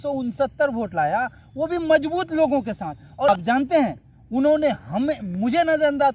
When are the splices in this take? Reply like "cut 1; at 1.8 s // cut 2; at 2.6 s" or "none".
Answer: cut 1; at 3.3 s